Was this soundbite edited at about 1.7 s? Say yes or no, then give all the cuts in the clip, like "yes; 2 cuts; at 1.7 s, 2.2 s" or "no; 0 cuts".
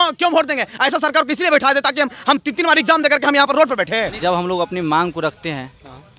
no; 1 cut; at 4.1 s